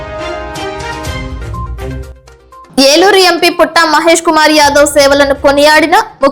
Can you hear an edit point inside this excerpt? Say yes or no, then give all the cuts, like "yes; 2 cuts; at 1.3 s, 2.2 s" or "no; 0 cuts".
no; 0 cuts